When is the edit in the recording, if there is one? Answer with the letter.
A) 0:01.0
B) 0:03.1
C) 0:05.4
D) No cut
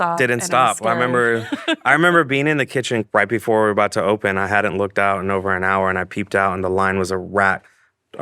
B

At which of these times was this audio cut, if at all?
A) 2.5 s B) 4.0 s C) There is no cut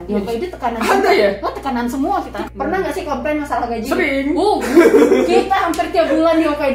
A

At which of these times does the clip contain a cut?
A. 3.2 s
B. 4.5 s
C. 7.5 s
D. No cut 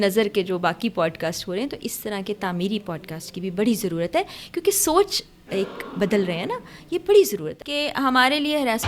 C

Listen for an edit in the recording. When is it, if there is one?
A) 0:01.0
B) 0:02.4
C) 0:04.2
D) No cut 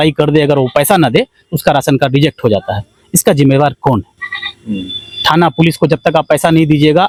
D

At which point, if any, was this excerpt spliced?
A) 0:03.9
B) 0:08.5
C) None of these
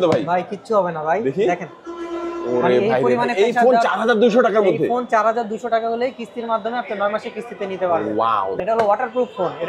B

